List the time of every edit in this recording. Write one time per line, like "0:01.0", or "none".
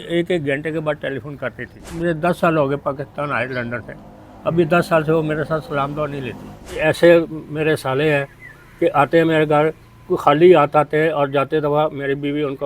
0:02.0
0:06.8